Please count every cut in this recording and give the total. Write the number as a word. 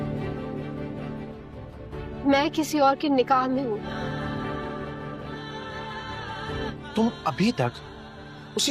one